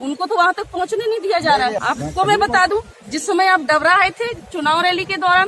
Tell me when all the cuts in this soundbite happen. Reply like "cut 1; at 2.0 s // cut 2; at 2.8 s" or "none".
cut 1; at 1.8 s

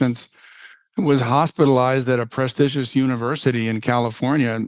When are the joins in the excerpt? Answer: none

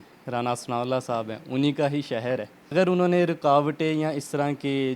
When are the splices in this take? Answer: cut 1; at 2.7 s

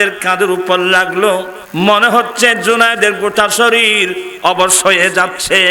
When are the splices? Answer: cut 1; at 1.6 s

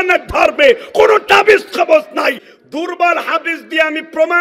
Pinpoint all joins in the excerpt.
cut 1; at 2.5 s

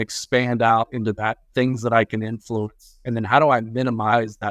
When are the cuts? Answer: none

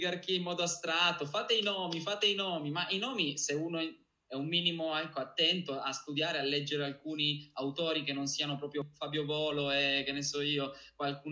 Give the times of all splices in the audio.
cut 1; at 8.9 s

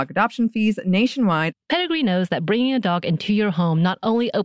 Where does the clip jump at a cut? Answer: cut 1; at 1.6 s

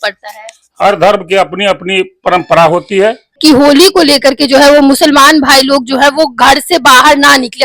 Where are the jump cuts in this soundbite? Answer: cut 1; at 3.4 s

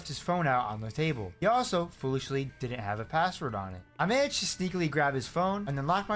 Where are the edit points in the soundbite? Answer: none

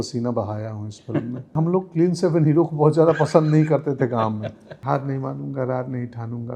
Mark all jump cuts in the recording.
cut 1; at 1.6 s // cut 2; at 4.7 s

